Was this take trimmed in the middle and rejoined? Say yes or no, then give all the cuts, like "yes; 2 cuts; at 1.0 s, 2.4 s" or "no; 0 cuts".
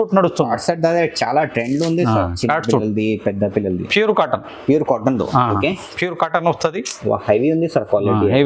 no; 0 cuts